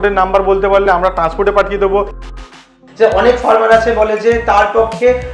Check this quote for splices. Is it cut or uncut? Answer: cut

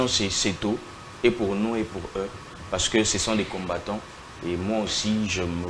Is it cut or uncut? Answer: uncut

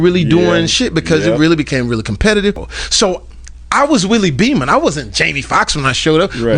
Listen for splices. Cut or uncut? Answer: cut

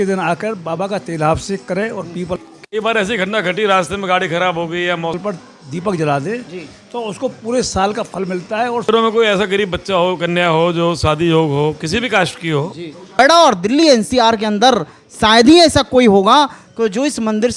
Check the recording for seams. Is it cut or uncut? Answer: cut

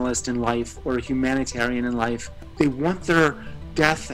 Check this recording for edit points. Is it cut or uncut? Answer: cut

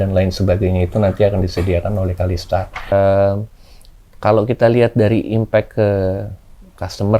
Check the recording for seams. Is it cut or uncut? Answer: cut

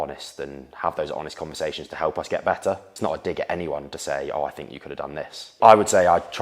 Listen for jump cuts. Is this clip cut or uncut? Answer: cut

